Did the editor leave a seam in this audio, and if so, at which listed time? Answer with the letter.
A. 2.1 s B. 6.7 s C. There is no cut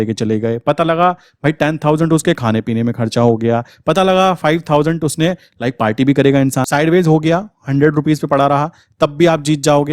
B